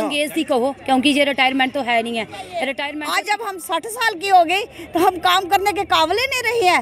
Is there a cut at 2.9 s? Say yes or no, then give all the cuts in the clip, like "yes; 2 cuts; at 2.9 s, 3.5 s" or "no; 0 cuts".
yes; 1 cut; at 2.9 s